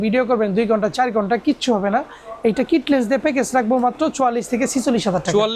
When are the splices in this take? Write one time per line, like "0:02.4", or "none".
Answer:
none